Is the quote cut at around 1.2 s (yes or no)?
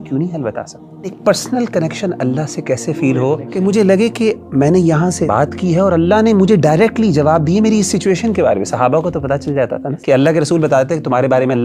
yes